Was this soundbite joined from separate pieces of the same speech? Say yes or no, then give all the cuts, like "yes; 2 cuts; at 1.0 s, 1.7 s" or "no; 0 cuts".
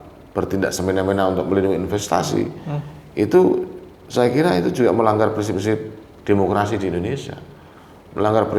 no; 0 cuts